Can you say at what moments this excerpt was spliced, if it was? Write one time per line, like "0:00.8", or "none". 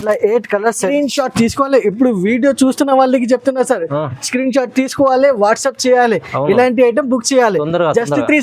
0:00.9